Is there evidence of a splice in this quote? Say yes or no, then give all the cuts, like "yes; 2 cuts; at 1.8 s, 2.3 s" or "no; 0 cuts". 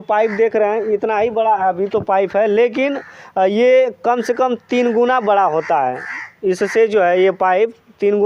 no; 0 cuts